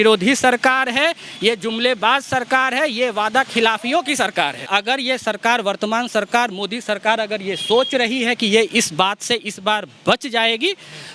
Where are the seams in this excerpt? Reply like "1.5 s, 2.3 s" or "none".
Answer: 4.7 s

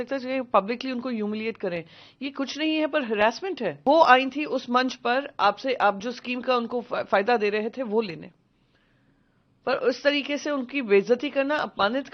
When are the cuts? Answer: 3.8 s

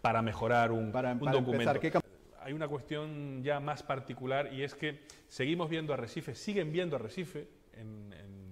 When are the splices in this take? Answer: 2.0 s

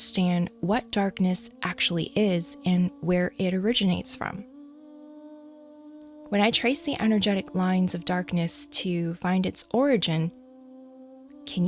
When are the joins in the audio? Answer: none

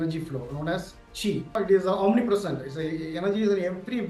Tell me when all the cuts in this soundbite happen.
1.6 s

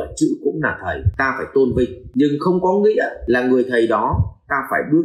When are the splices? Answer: 1.1 s, 2.0 s, 3.2 s

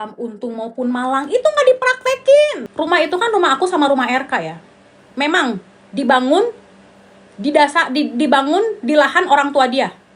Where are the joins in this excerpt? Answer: 2.6 s

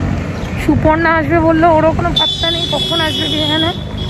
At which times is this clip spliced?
none

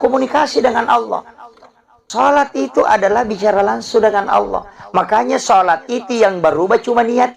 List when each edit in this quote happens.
2.1 s

